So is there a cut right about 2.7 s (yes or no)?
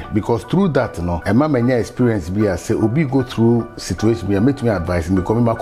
no